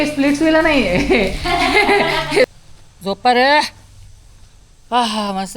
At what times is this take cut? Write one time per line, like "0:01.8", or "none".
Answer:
0:02.5